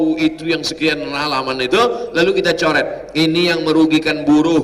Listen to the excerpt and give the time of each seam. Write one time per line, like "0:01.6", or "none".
none